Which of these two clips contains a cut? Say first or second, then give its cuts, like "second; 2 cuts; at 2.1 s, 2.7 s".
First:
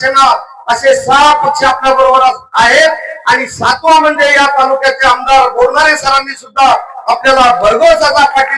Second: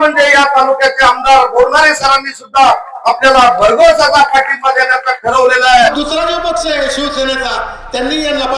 second; 1 cut; at 5.9 s